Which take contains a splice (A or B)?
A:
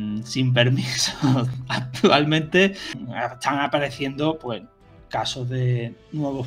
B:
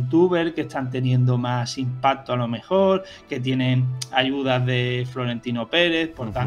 A